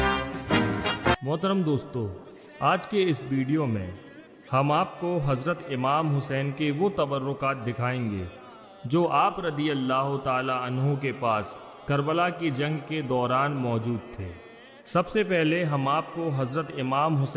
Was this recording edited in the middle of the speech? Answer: yes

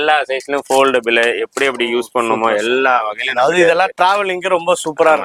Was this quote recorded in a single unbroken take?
yes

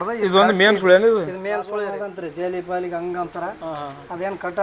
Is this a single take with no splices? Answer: no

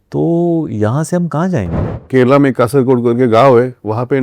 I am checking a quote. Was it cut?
yes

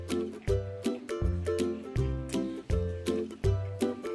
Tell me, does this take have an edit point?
no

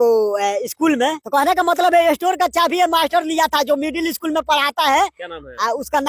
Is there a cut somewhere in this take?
yes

